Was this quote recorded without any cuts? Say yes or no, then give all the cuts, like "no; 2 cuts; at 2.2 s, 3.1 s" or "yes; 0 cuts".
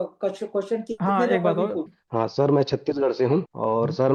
no; 1 cut; at 1.9 s